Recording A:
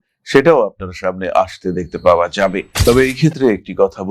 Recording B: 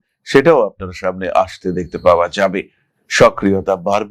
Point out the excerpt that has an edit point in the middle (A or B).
A